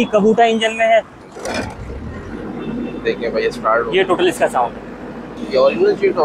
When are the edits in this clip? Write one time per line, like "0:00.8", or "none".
0:01.3
0:05.3